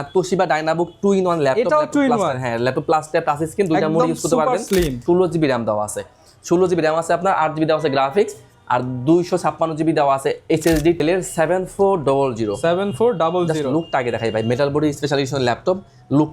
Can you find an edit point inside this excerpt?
yes; 2 cuts; at 5.0 s, 11.0 s

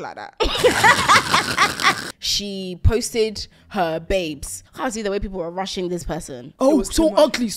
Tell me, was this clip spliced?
yes; 3 cuts; at 2.0 s, 4.6 s, 6.4 s

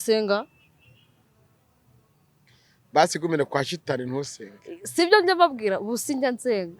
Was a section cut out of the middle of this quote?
no; 0 cuts

